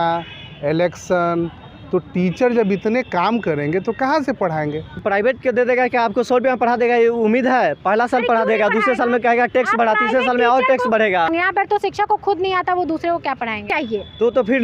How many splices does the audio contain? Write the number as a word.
three